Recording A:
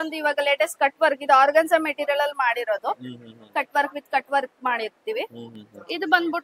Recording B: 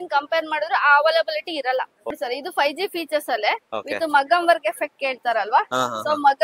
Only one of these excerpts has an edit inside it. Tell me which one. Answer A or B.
B